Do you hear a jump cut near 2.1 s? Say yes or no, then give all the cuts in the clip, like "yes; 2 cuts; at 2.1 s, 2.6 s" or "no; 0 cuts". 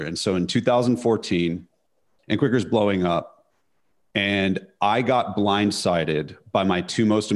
yes; 1 cut; at 2.1 s